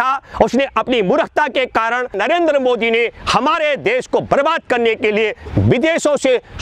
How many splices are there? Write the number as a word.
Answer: one